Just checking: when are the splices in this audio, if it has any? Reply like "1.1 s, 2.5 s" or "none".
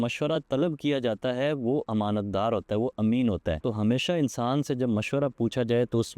none

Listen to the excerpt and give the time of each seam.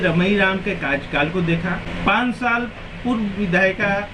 1.9 s

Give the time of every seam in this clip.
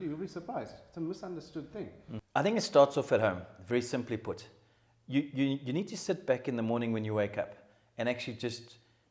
2.1 s

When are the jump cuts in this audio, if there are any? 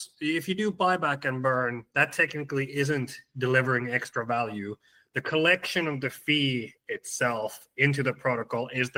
none

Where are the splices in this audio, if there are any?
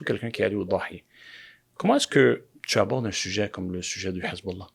none

